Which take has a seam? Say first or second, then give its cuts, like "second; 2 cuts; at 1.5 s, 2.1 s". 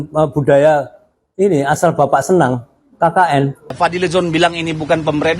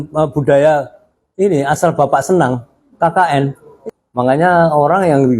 first; 1 cut; at 3.7 s